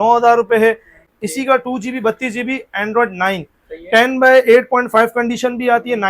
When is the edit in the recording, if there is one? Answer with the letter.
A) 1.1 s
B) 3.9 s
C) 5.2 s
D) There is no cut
A